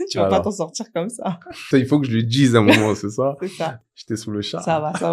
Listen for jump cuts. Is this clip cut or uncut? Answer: cut